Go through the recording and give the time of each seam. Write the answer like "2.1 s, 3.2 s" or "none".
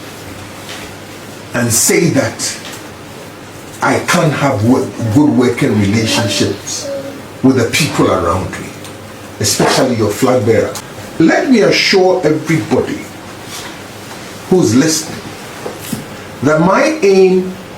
10.8 s